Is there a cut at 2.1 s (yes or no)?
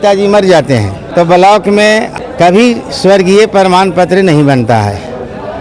yes